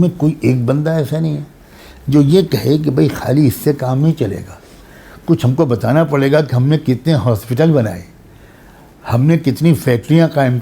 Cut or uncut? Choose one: uncut